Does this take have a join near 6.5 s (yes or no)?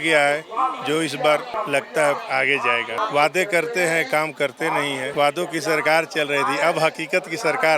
no